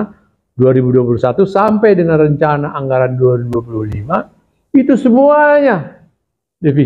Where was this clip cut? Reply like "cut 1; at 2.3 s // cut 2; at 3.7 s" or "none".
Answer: none